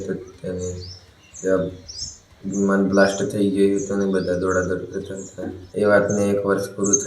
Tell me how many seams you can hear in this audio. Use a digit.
1